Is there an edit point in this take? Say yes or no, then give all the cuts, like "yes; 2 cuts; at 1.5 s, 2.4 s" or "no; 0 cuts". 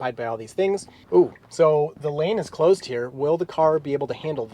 yes; 1 cut; at 0.9 s